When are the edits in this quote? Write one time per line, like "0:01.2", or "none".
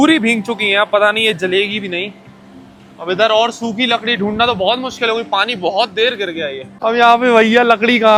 none